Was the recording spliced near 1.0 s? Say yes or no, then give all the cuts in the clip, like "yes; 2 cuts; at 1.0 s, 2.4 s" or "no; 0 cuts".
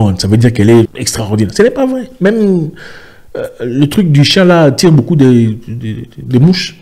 yes; 1 cut; at 1.0 s